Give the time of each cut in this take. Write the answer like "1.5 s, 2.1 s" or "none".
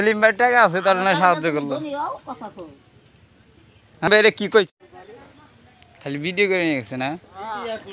4.7 s